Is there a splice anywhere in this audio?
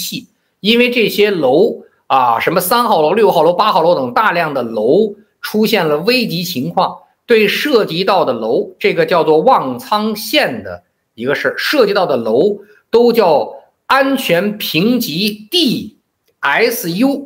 no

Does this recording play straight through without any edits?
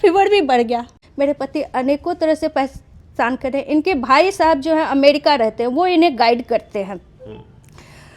no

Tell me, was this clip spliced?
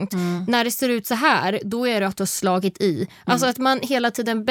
no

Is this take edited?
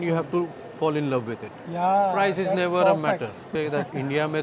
yes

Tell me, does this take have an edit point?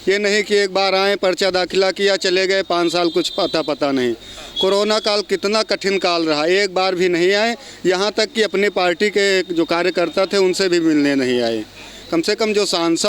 no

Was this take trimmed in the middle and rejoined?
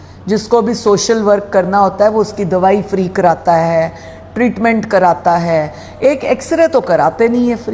no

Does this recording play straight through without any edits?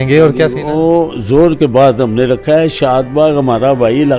yes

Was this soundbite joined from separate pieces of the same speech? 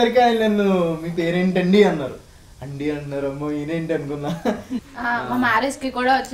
yes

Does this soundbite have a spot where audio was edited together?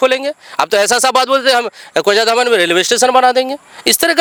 no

